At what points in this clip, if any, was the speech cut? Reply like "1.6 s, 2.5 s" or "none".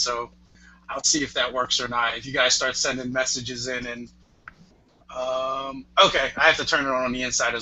none